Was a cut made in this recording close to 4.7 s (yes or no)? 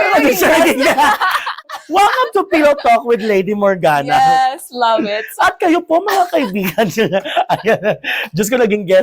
no